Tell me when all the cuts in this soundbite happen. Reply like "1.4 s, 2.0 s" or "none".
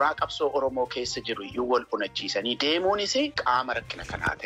3.4 s